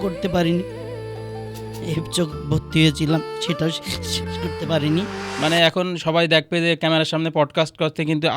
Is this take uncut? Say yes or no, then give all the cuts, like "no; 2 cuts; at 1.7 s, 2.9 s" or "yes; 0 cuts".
no; 1 cut; at 5.2 s